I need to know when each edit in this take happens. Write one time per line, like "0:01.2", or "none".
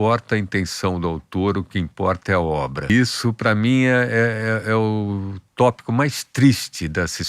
0:02.9